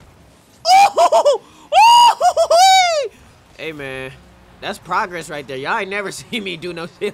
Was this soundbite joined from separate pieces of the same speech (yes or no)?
no